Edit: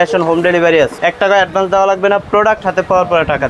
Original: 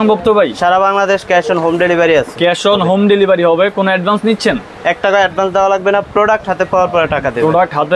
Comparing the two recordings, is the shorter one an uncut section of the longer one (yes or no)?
no